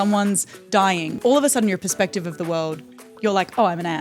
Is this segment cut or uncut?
cut